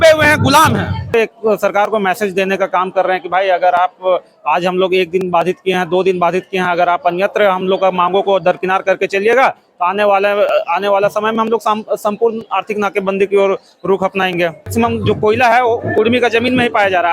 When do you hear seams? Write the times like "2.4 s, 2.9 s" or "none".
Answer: 1.1 s, 14.7 s